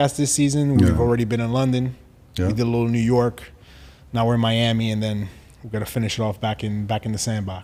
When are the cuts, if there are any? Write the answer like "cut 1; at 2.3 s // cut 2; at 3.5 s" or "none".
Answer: none

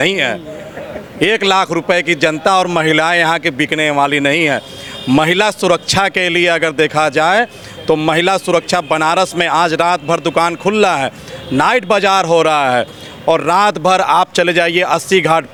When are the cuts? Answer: none

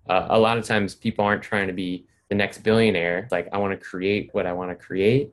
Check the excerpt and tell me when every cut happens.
cut 1; at 3.2 s

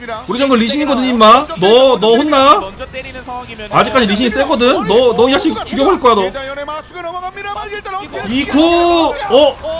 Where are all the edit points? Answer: none

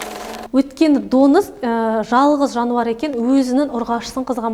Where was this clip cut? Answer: none

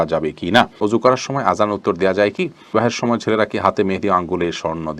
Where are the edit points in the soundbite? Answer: cut 1; at 1.2 s // cut 2; at 2.7 s

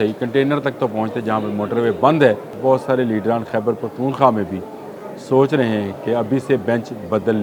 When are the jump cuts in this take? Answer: cut 1; at 2.5 s

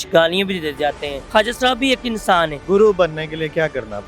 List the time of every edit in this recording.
cut 1; at 1.1 s // cut 2; at 2.6 s

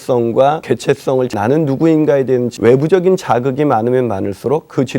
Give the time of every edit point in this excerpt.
cut 1; at 1.0 s // cut 2; at 2.5 s

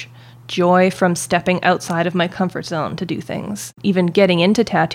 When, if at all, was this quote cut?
cut 1; at 3.7 s

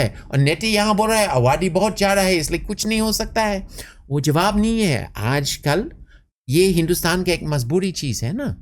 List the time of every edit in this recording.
none

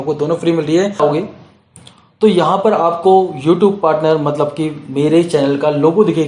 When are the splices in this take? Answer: cut 1; at 1.0 s

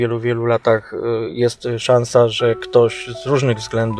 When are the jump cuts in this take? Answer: none

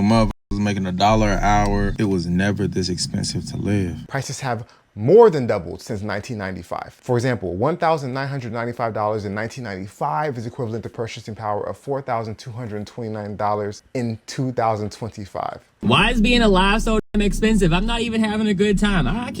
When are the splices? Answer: cut 1; at 4.0 s // cut 2; at 15.7 s

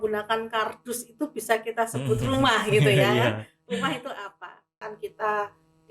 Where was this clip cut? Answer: cut 1; at 4.6 s

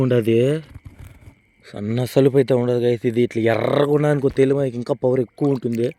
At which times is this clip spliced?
none

